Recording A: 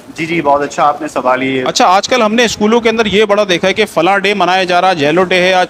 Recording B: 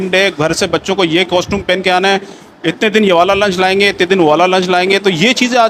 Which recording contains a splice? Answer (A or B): A